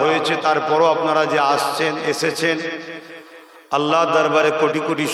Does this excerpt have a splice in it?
no; 0 cuts

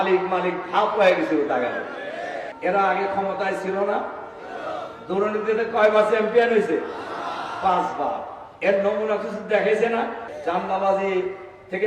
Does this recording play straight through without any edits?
no; 2 cuts; at 2.4 s, 10.3 s

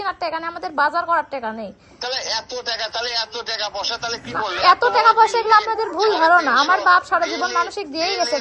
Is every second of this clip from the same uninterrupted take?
yes; 0 cuts

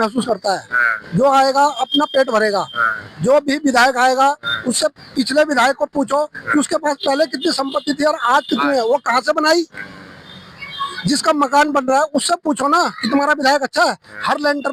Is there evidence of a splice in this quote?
no; 0 cuts

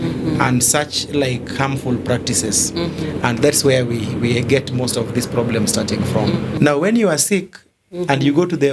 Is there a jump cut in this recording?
yes; 1 cut; at 6.5 s

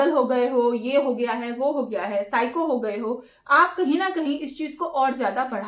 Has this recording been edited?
no; 0 cuts

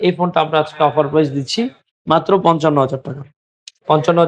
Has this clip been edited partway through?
no; 0 cuts

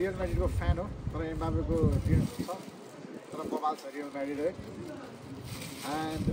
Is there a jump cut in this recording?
no; 0 cuts

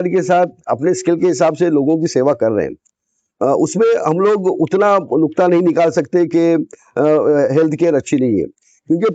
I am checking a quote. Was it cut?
no; 0 cuts

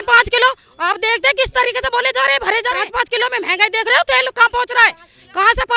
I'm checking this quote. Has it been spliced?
yes; 1 cut; at 2.9 s

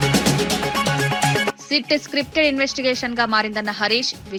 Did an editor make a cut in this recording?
no; 0 cuts

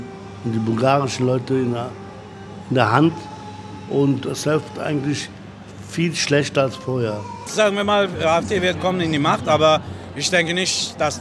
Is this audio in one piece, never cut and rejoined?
no; 1 cut; at 7.4 s

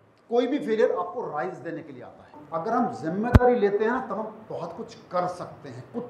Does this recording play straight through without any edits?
no; 1 cut; at 2.4 s

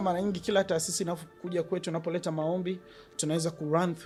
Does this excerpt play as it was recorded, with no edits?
yes; 0 cuts

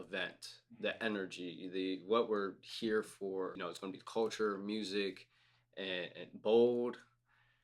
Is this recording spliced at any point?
yes; 1 cut; at 3.6 s

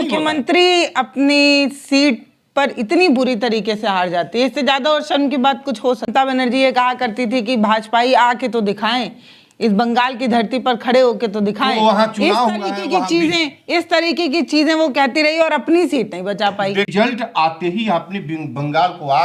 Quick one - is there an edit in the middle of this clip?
yes; 2 cuts; at 6.1 s, 16.9 s

